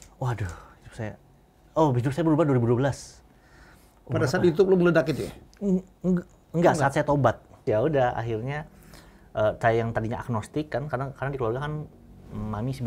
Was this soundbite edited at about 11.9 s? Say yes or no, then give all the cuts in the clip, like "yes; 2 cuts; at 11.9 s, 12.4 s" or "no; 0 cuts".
no; 1 cut; at 7.6 s